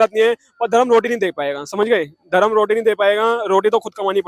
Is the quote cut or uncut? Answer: uncut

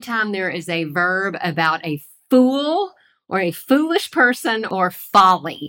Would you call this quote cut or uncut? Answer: cut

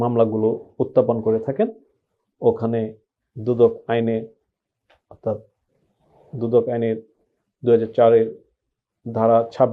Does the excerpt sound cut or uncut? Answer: uncut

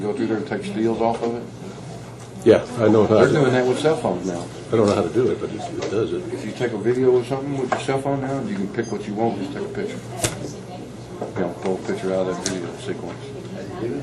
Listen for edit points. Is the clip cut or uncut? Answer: cut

